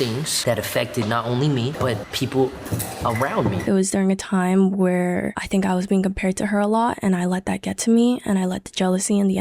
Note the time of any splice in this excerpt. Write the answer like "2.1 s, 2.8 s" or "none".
3.6 s, 5.4 s